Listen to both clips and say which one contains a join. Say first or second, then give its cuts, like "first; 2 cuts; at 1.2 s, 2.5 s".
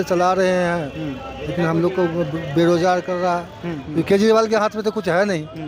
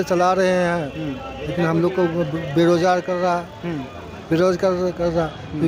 first; 1 cut; at 3.8 s